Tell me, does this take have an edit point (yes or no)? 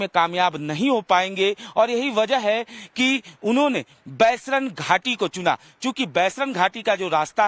yes